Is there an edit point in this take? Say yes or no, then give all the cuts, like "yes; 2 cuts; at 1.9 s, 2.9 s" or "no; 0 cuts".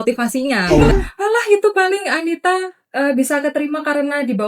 yes; 1 cut; at 0.9 s